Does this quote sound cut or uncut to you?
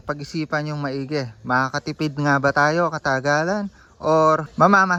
uncut